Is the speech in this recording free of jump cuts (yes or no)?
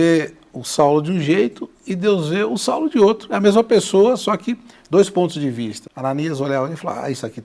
no